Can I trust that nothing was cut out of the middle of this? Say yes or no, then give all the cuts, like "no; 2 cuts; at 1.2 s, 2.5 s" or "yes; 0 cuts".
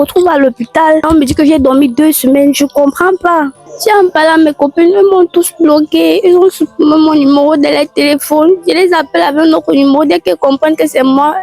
no; 2 cuts; at 1.1 s, 3.6 s